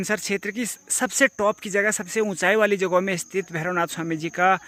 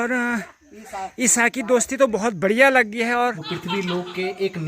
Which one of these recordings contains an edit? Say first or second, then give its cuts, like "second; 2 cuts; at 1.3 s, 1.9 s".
second; 1 cut; at 3.5 s